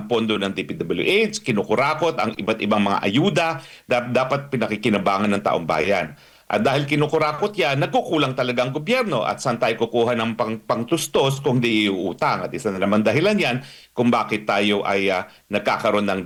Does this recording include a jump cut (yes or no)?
no